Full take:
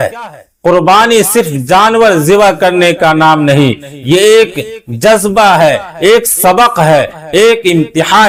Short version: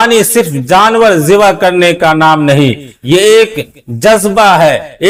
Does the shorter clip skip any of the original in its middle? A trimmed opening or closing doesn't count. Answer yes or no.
no